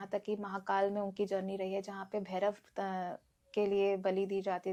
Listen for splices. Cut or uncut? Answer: uncut